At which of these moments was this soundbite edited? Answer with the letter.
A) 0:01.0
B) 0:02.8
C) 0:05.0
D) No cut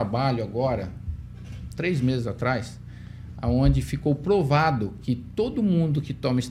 D